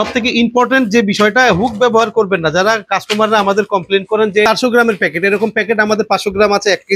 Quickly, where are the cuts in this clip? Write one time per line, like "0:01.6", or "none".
0:04.5